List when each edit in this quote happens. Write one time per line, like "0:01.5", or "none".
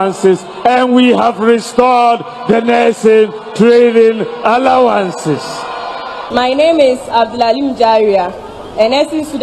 0:06.2